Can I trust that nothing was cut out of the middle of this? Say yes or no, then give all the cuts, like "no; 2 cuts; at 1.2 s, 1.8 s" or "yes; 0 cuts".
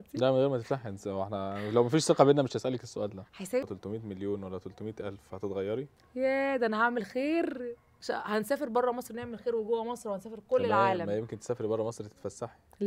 no; 1 cut; at 3.7 s